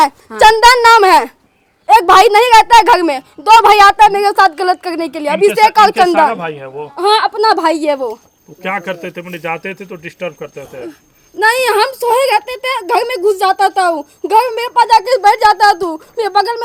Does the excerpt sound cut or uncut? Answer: uncut